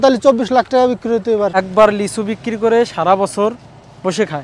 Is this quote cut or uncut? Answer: cut